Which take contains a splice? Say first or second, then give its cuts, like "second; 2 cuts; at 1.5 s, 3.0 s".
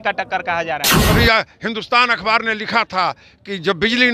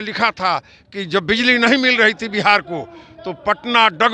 first; 1 cut; at 0.9 s